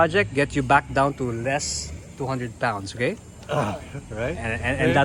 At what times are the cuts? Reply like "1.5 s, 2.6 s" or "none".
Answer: none